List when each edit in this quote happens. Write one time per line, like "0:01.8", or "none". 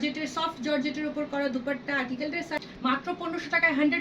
0:02.6